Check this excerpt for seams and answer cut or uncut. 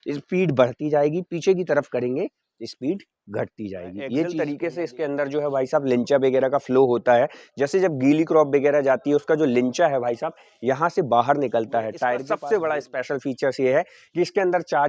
cut